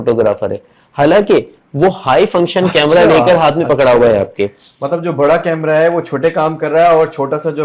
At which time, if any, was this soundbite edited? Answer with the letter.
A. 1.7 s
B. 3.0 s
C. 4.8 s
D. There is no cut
D